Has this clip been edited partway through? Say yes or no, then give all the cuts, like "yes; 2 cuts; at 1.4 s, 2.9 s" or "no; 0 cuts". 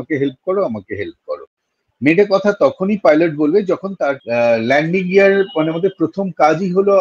yes; 1 cut; at 4.2 s